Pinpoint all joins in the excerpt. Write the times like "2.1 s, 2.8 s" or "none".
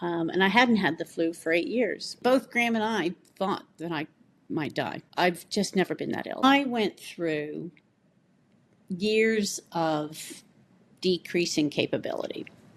2.2 s, 6.4 s